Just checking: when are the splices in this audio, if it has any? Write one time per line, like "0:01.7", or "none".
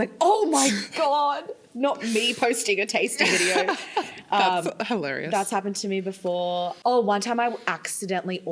0:06.8